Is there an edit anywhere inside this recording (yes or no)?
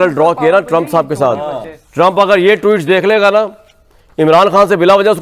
no